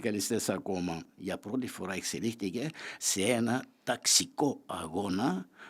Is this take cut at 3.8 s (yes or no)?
no